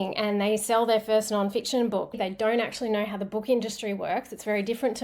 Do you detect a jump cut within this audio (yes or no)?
yes